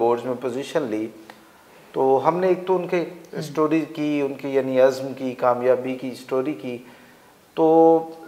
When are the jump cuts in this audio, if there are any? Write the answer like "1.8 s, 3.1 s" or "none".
none